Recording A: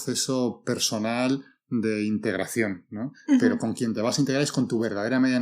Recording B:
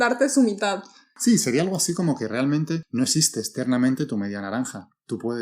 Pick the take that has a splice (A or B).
B